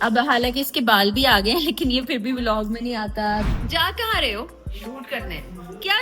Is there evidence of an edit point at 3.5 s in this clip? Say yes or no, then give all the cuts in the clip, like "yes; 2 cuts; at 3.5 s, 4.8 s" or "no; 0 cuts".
yes; 1 cut; at 3.5 s